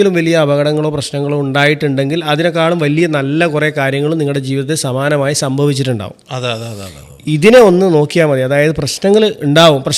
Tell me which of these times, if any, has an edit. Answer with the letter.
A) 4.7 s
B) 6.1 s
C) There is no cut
C